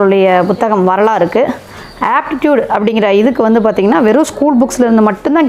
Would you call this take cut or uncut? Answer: uncut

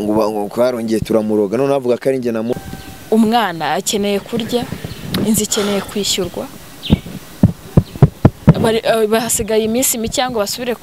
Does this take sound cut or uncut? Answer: cut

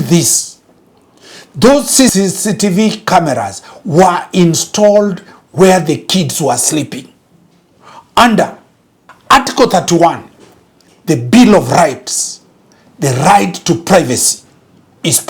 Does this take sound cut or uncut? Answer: cut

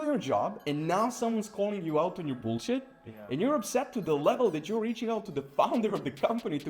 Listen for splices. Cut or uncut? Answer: uncut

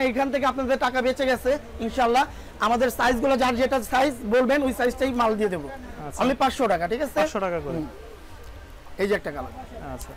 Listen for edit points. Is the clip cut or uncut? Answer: uncut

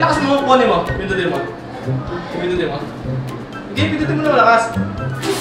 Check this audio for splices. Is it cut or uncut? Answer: uncut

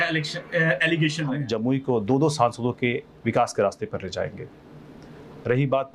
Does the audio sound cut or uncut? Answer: cut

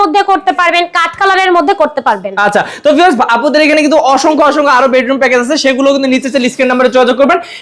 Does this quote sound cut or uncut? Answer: uncut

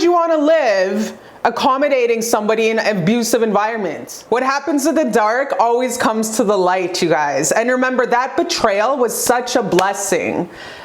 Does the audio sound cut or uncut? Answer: cut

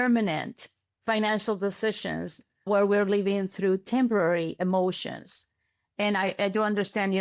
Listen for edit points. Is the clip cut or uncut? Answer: uncut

